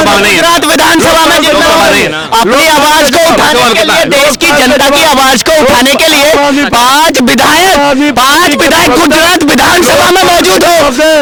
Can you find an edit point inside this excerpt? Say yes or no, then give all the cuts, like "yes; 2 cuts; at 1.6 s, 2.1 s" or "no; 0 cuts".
no; 0 cuts